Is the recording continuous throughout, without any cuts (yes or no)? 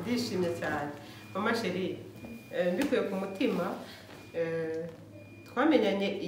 yes